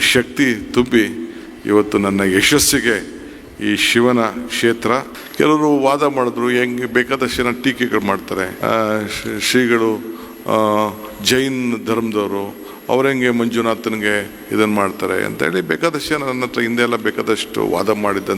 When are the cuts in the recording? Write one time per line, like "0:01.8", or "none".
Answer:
0:05.2
0:08.5